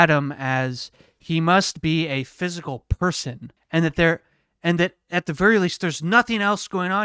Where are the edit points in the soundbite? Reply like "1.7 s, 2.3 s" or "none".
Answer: 3.5 s

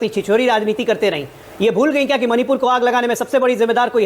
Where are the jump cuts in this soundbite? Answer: none

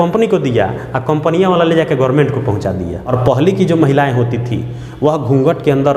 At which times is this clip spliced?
3.0 s

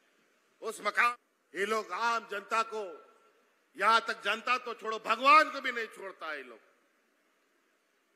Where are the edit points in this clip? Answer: 1.1 s

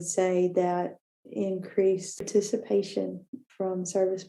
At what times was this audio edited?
2.3 s

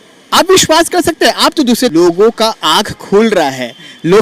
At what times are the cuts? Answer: 1.9 s

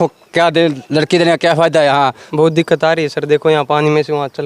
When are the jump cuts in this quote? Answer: 2.2 s

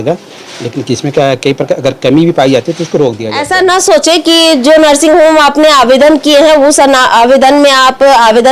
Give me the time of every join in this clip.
3.3 s

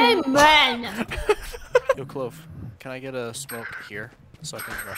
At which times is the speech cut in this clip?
2.0 s

